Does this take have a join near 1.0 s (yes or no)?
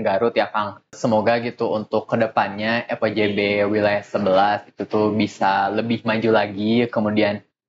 yes